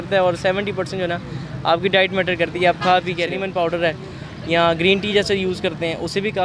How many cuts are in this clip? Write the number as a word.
one